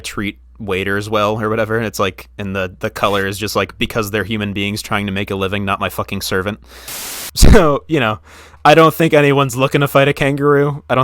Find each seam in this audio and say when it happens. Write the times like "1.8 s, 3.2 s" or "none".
7.2 s

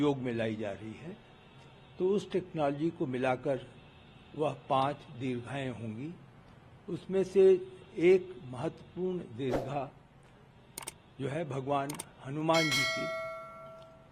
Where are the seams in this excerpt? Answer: none

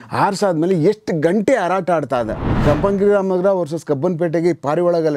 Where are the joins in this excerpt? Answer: 2.5 s

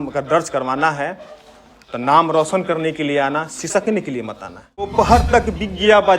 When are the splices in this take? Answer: 4.9 s

